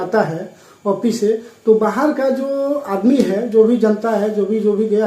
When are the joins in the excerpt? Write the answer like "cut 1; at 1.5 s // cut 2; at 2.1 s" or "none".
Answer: none